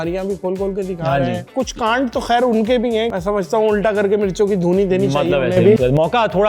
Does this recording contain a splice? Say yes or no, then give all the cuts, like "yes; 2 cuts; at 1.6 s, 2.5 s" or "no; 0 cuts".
yes; 3 cuts; at 1.5 s, 3.1 s, 5.8 s